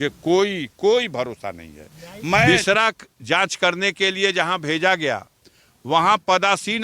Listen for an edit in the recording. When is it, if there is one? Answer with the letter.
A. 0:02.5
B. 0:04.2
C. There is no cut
A